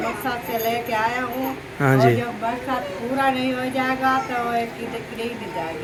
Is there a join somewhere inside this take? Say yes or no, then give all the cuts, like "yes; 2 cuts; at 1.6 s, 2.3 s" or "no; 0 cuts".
no; 0 cuts